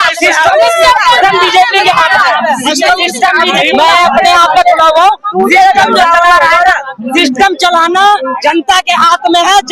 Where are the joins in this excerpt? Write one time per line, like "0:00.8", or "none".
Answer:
0:03.5